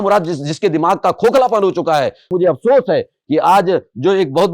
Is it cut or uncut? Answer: cut